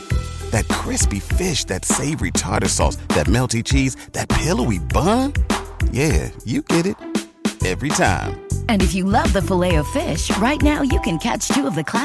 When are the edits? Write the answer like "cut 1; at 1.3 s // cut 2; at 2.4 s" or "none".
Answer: none